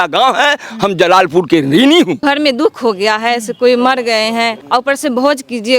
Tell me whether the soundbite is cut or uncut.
cut